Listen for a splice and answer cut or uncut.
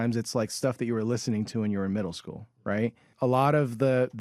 cut